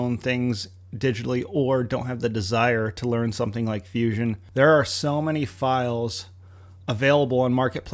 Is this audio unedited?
no; 1 cut; at 4.4 s

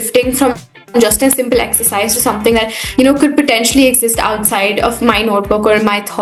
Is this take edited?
no; 0 cuts

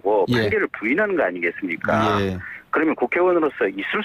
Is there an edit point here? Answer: yes; 1 cut; at 2.0 s

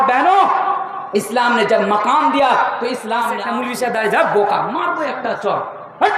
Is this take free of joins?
no; 1 cut; at 3.4 s

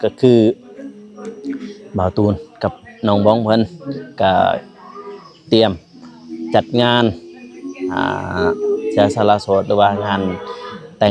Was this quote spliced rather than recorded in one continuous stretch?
no; 0 cuts

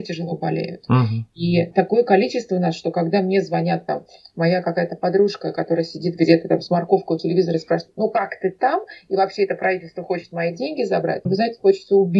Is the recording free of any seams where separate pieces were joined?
no; 1 cut; at 11.3 s

